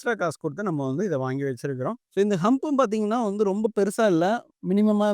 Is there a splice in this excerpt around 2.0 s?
yes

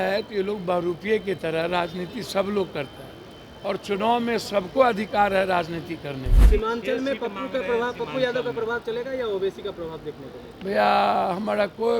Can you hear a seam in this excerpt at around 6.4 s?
yes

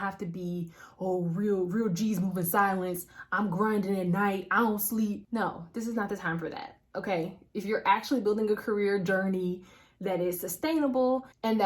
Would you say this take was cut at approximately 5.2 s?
yes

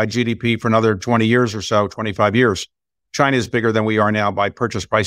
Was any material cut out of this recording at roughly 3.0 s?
yes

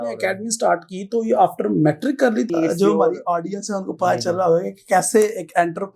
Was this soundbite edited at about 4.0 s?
no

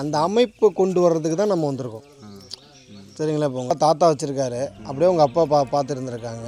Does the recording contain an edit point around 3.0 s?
no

